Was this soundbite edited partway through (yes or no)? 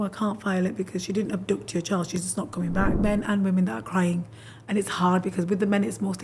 yes